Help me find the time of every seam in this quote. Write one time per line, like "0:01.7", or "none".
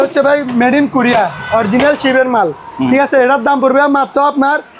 none